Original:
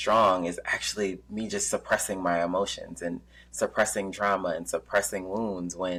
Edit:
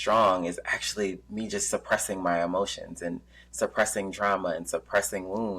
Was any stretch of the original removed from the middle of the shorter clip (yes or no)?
no